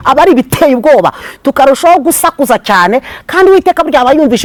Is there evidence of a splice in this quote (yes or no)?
no